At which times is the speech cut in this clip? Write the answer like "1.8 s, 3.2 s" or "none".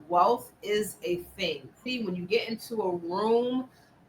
1.9 s